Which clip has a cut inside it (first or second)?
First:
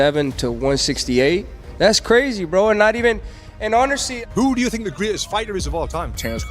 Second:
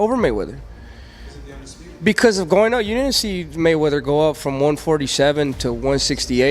first